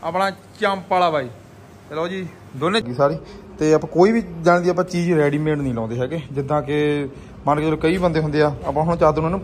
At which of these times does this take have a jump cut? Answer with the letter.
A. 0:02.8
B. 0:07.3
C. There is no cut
A